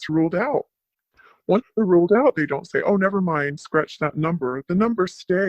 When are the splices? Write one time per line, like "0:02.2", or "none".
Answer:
none